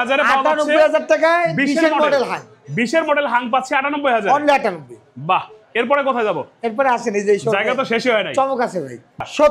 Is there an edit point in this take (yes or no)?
no